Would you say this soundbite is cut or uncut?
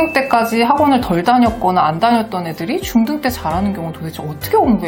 uncut